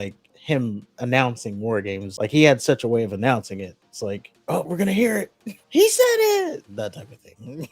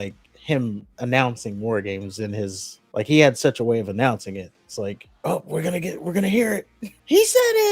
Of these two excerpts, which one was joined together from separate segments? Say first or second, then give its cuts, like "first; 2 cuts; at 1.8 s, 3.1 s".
first; 3 cuts; at 2.1 s, 4.7 s, 6.7 s